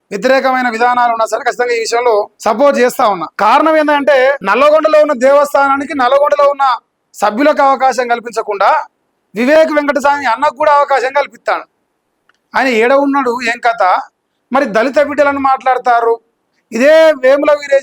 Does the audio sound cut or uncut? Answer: cut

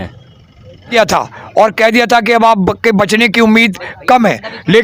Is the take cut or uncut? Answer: cut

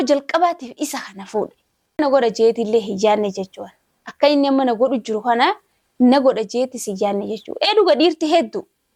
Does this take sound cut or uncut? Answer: uncut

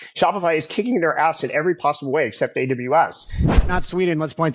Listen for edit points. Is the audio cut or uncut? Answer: cut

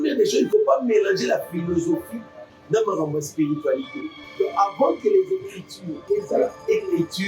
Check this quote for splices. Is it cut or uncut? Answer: cut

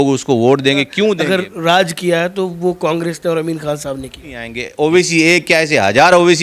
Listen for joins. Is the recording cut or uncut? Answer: cut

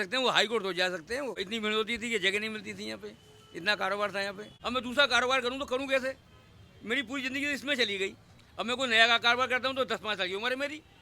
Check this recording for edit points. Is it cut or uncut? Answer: cut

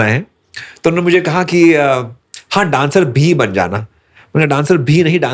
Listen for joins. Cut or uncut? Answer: uncut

